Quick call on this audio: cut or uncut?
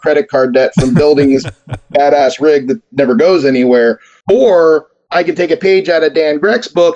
cut